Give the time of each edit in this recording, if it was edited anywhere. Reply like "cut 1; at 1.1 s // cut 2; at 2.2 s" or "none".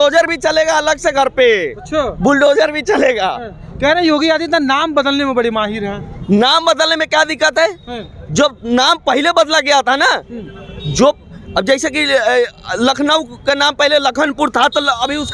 none

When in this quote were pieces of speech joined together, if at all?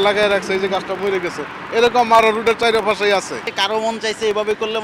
cut 1; at 3.5 s

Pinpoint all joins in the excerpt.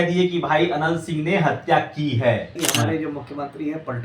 cut 1; at 2.5 s

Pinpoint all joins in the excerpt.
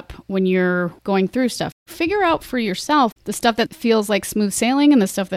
cut 1; at 1.0 s // cut 2; at 1.9 s // cut 3; at 3.7 s

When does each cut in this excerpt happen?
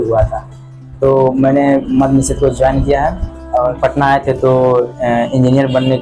cut 1; at 3.8 s

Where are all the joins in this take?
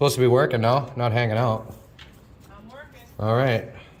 none

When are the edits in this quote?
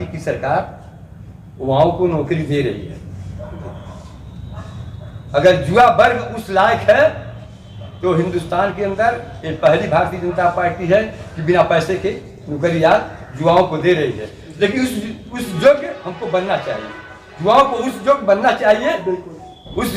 none

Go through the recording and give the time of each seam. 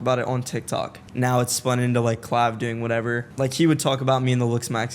cut 1; at 1.0 s // cut 2; at 3.3 s

